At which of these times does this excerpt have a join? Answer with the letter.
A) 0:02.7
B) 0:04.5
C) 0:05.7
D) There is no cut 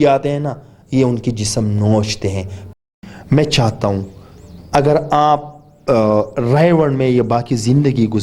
A